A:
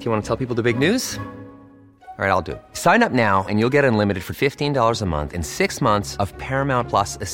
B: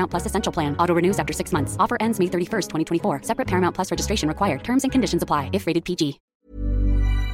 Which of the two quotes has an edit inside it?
B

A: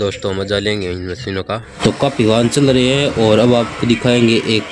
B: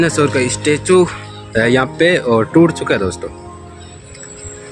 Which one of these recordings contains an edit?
A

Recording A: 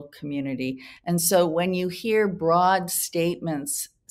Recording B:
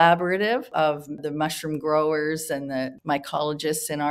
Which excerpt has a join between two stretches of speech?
B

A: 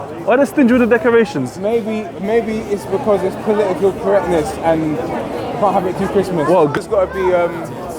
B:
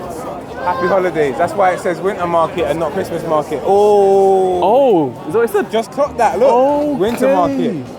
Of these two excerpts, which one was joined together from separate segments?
A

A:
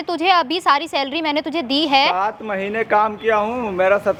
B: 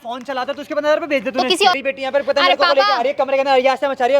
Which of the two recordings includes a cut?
B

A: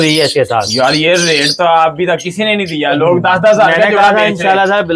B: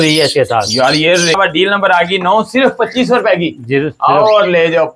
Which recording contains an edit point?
B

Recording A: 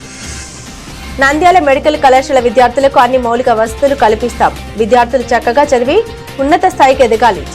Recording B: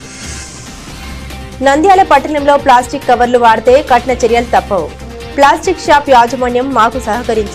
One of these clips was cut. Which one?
A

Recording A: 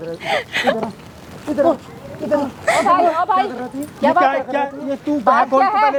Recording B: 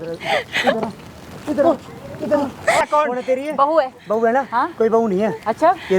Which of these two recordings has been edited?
B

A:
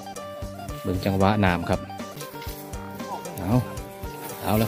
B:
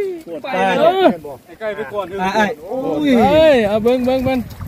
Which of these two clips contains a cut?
A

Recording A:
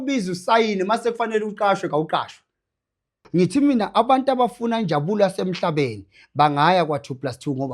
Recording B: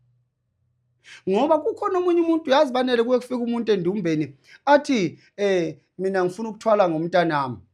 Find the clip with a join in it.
A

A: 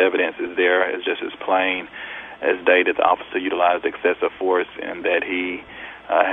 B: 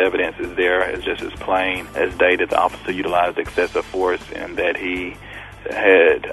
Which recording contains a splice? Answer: B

